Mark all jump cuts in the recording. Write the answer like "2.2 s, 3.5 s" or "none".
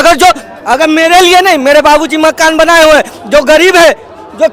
none

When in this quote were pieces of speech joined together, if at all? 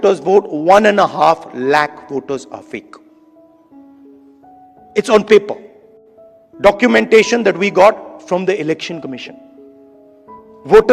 2.8 s, 4.9 s

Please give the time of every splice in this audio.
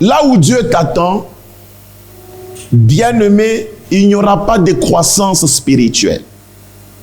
none

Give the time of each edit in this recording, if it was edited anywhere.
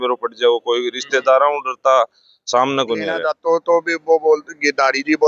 3.2 s

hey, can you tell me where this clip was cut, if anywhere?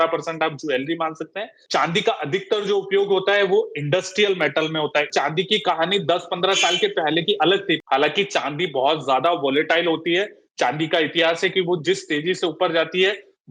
1.6 s, 5.1 s, 7.8 s

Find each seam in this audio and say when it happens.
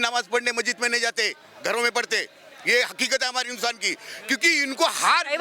none

